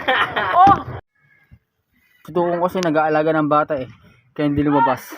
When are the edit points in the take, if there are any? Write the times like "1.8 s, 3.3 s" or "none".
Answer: 2.2 s